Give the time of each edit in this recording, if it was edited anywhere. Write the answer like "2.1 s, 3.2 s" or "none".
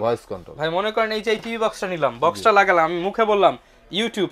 none